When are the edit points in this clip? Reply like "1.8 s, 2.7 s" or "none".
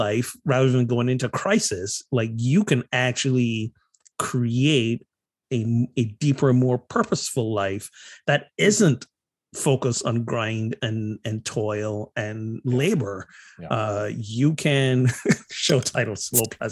none